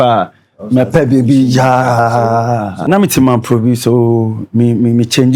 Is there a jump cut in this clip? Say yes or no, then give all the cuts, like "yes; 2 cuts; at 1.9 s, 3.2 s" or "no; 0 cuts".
yes; 1 cut; at 2.9 s